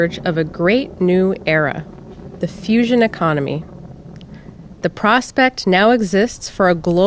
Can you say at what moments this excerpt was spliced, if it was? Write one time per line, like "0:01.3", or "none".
0:01.6